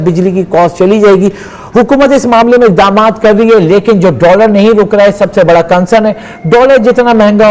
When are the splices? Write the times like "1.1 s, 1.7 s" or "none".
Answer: none